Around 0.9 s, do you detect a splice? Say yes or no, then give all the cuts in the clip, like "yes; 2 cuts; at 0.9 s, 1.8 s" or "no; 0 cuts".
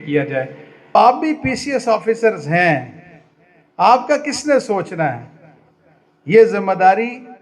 yes; 1 cut; at 0.9 s